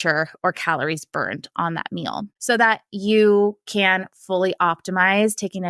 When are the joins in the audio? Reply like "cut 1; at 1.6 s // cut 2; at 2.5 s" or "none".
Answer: cut 1; at 2.3 s